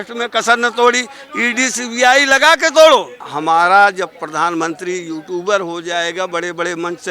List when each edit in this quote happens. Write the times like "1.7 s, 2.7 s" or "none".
3.2 s